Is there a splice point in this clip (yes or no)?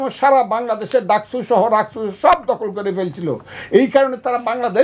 no